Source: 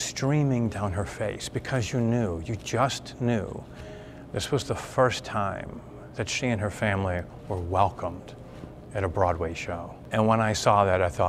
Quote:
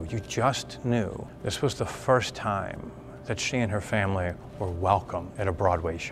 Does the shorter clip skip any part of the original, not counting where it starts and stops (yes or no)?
yes